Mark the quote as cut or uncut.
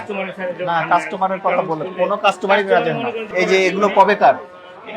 cut